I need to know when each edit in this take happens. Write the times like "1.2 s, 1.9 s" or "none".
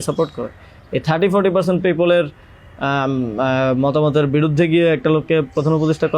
none